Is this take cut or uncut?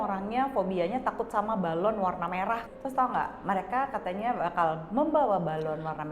cut